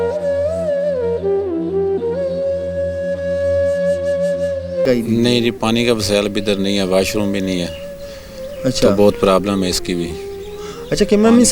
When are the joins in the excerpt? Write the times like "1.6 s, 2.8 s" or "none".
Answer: 4.8 s

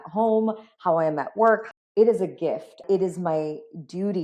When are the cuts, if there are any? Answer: 1.8 s, 2.8 s

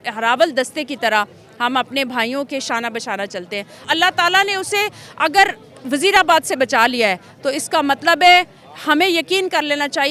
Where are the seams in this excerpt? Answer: 3.9 s, 5.7 s

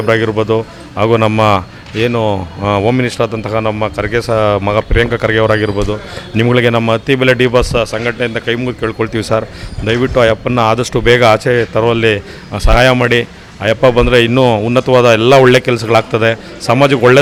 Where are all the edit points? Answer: none

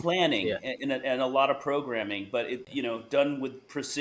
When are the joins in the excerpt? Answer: 2.7 s

